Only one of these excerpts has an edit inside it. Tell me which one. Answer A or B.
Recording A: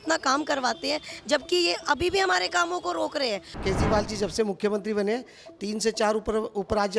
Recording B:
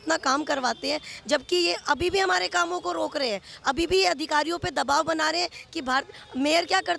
A